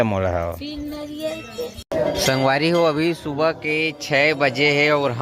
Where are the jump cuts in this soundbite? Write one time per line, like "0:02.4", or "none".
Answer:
0:01.8